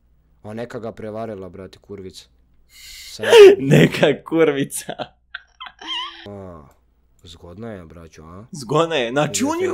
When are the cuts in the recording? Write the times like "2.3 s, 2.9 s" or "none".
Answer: 6.3 s